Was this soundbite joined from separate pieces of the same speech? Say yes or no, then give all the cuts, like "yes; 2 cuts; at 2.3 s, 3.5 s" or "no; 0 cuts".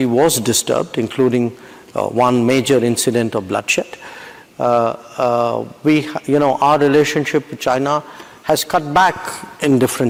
no; 0 cuts